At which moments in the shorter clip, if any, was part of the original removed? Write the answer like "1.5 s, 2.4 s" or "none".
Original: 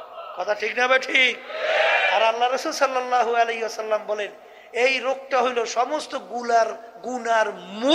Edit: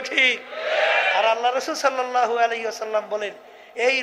none